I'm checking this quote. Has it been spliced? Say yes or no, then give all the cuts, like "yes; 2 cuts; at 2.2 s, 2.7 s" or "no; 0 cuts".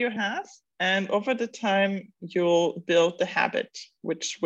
no; 0 cuts